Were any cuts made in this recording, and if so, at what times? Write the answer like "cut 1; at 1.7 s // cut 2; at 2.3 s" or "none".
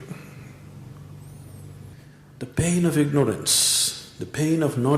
cut 1; at 1.9 s